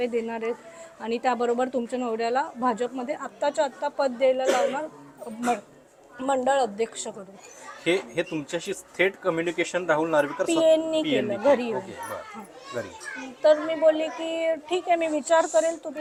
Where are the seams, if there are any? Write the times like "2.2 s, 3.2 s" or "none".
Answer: none